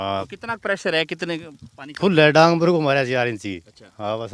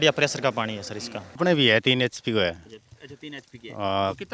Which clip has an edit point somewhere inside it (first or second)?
second